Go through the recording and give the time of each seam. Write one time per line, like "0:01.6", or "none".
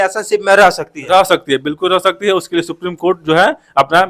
none